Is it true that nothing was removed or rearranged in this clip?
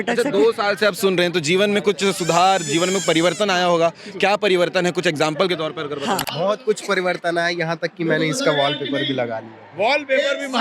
no; 1 cut; at 6.3 s

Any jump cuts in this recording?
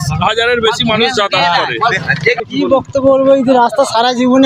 yes; 1 cut; at 1.9 s

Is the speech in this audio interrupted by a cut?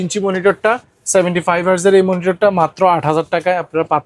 no; 0 cuts

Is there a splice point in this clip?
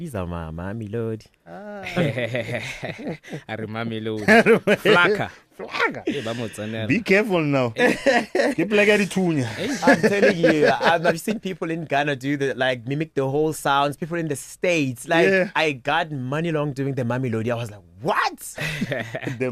no; 0 cuts

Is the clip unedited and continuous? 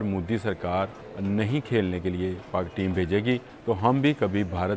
no; 2 cuts; at 1.0 s, 3.5 s

